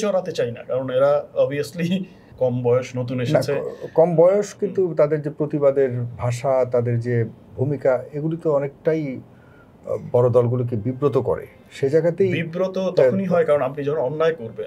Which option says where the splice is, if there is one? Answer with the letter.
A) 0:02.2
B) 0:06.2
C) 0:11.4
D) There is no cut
A